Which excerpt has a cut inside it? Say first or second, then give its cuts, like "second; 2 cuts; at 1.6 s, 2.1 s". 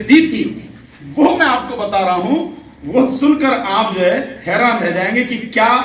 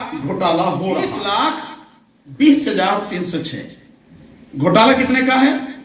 second; 1 cut; at 1.3 s